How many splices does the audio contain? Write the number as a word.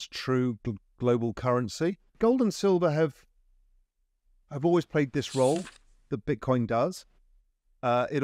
one